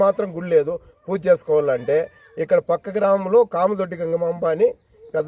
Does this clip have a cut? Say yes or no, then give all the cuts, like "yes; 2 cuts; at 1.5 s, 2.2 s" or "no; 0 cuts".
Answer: no; 0 cuts